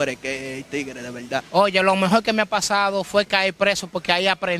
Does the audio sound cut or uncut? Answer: cut